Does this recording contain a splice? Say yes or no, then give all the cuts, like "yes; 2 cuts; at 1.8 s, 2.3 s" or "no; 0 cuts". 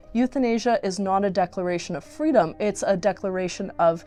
no; 0 cuts